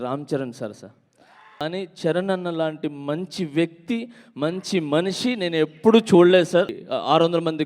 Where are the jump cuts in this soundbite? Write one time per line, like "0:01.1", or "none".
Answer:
0:01.6
0:06.8